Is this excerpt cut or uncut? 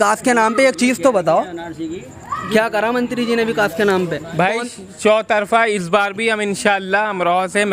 uncut